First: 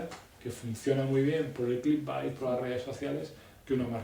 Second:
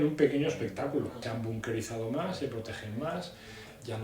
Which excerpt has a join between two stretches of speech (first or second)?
second